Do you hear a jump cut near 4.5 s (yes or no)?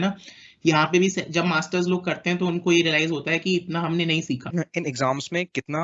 yes